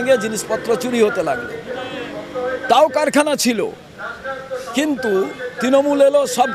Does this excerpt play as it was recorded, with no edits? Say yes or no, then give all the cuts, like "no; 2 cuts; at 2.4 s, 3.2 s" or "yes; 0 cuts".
yes; 0 cuts